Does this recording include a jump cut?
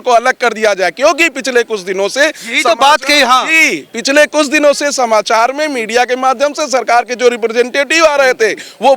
no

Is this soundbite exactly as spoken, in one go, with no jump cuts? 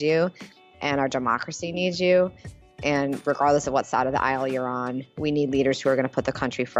yes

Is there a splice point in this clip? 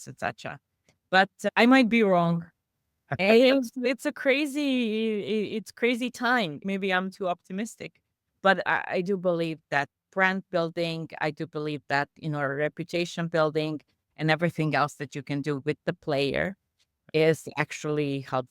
yes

